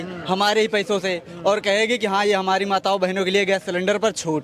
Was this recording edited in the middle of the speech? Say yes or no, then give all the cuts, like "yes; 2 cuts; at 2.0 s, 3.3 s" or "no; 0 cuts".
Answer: no; 0 cuts